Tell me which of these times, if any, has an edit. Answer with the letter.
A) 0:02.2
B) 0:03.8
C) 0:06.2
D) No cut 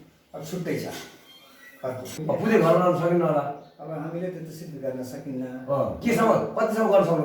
A